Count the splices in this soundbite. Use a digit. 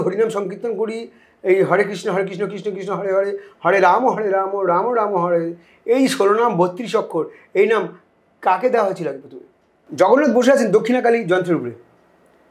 1